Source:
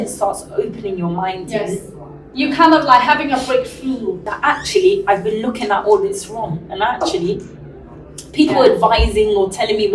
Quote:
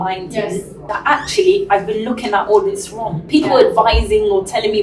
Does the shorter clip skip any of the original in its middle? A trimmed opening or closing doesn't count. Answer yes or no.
yes